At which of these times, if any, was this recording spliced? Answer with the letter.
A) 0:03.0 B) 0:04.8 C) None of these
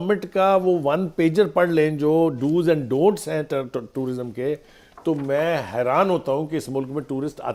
C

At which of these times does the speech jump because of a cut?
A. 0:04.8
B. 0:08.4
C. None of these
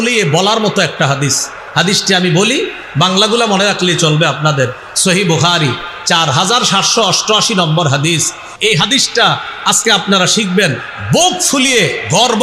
B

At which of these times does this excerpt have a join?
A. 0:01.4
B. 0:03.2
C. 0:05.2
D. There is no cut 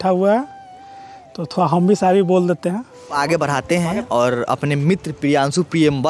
B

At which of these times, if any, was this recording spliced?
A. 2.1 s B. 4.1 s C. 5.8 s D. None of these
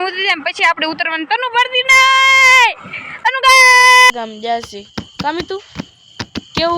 B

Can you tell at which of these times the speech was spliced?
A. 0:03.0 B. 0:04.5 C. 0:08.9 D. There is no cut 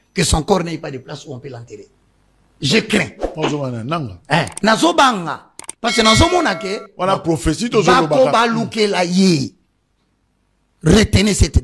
D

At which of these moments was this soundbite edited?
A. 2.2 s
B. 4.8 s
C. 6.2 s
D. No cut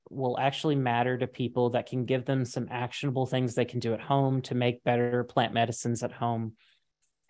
D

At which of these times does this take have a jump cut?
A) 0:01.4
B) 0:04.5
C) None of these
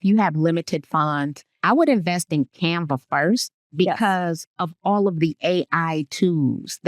A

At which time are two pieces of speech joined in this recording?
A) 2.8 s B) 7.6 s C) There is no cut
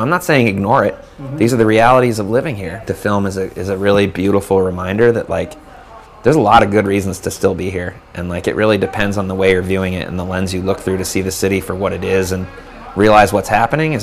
A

